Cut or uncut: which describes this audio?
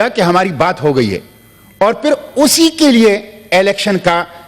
uncut